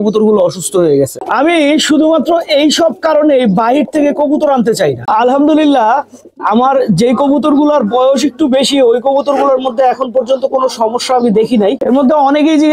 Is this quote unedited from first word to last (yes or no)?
no